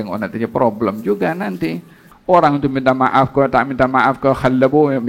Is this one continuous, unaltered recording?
no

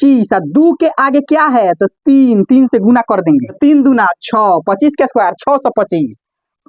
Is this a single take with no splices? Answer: no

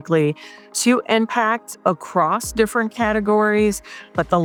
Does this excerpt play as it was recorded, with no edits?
yes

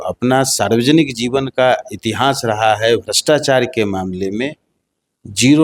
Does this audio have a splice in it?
no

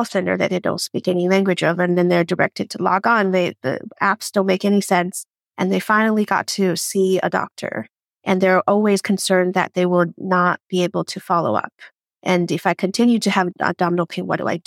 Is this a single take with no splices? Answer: no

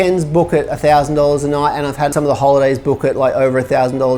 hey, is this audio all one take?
no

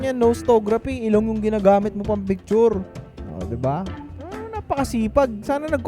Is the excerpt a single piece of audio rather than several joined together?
yes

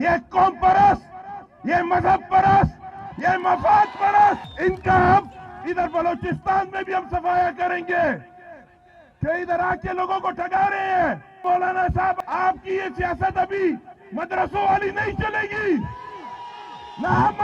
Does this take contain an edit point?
yes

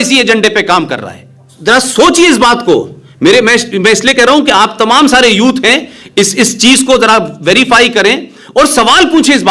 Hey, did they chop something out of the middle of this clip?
yes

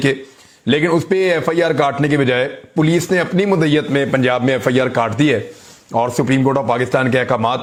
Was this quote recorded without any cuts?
yes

